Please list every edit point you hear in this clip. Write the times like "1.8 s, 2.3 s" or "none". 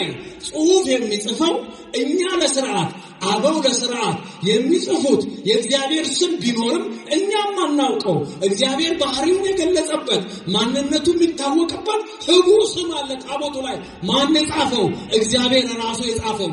none